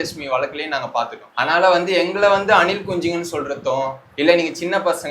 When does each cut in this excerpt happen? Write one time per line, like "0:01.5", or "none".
0:01.2
0:04.0